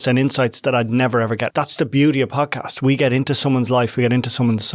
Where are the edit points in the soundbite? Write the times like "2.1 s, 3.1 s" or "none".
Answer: 1.5 s